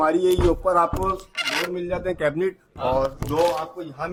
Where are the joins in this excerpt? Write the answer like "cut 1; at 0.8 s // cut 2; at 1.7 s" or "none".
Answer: none